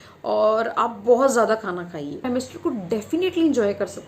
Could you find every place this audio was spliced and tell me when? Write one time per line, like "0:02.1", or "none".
0:02.2